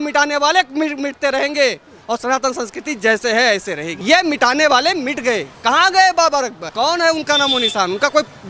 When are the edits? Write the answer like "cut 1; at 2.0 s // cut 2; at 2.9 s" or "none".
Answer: cut 1; at 3.9 s // cut 2; at 5.5 s // cut 3; at 6.7 s

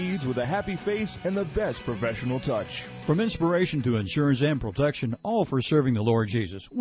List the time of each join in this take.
cut 1; at 2.8 s

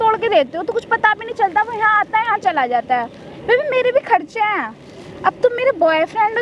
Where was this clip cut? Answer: none

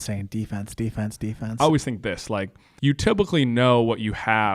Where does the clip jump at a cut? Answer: cut 1; at 1.4 s // cut 2; at 2.6 s

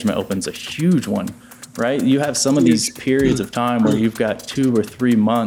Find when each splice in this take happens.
none

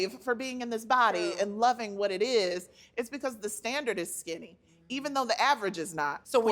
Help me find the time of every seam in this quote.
cut 1; at 2.8 s

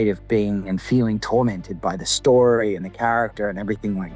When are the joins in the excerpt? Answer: none

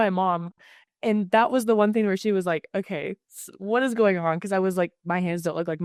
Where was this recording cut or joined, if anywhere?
none

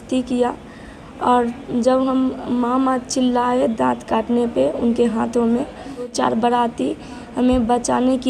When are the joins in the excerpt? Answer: cut 1; at 6.1 s

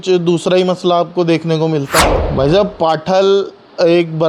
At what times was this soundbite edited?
cut 1; at 2.2 s

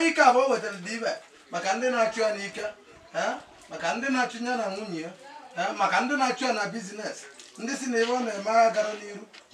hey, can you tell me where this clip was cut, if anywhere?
none

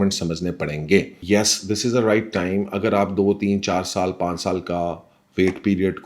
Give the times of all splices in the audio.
cut 1; at 1.2 s

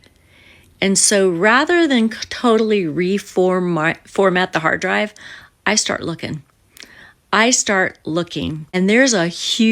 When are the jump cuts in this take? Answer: cut 1; at 8.6 s

